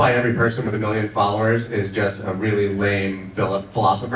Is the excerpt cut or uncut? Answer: uncut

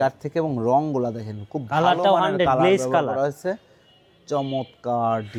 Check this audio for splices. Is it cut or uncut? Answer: uncut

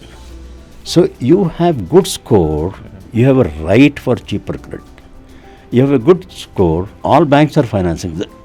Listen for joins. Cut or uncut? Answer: cut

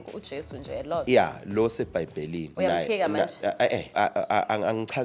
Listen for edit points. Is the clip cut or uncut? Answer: cut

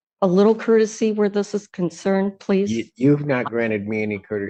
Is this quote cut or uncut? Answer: uncut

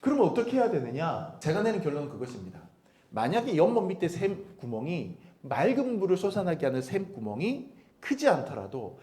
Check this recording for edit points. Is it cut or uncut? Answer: cut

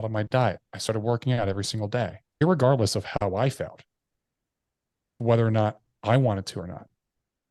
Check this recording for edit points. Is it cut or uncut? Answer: cut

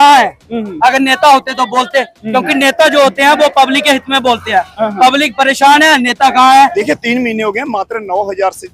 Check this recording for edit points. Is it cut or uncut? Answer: cut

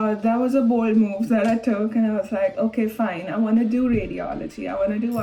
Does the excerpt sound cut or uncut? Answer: uncut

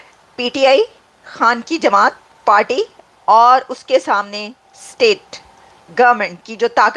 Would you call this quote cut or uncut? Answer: uncut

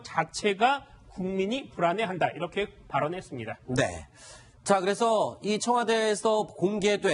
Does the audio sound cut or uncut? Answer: uncut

